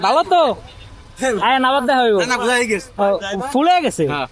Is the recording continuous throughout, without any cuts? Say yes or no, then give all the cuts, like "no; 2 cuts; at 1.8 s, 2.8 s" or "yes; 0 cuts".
yes; 0 cuts